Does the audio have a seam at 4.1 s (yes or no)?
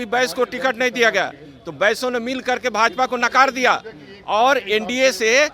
no